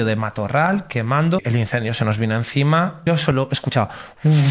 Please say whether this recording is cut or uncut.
cut